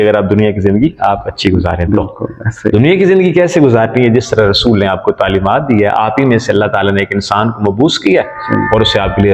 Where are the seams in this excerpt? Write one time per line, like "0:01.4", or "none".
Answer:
none